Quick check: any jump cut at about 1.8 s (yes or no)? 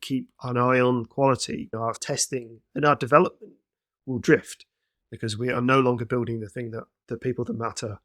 yes